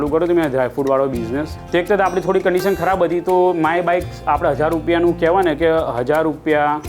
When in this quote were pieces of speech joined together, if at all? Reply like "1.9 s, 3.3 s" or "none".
1.5 s